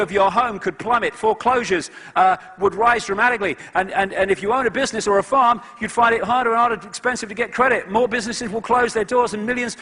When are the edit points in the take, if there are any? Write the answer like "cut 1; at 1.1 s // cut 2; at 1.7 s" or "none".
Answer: cut 1; at 7.5 s